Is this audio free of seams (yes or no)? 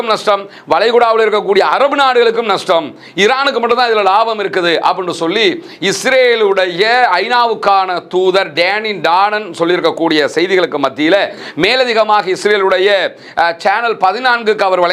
yes